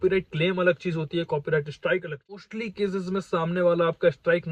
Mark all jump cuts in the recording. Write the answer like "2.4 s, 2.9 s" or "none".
2.5 s